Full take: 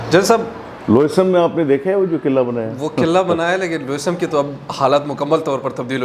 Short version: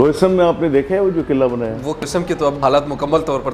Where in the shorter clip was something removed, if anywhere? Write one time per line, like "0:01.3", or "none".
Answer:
0:02.0